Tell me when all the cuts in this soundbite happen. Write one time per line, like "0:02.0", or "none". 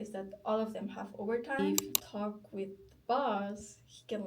0:01.6